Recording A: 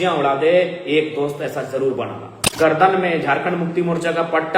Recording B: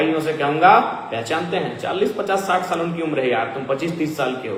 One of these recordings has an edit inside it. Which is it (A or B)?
A